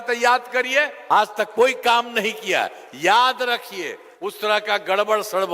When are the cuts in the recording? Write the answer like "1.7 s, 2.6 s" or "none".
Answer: 1.0 s